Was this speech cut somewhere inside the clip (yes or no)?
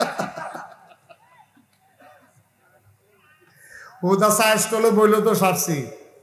no